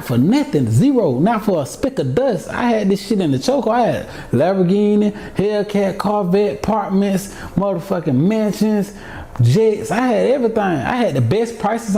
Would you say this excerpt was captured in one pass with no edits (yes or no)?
yes